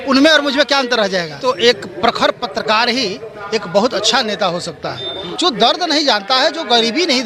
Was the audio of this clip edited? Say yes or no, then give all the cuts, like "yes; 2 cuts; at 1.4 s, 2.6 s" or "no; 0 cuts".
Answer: yes; 2 cuts; at 1.3 s, 5.2 s